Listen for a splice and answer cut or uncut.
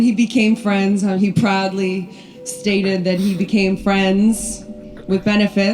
cut